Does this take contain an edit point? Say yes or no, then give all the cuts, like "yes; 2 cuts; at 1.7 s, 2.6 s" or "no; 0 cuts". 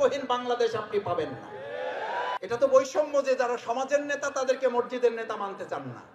yes; 1 cut; at 2.4 s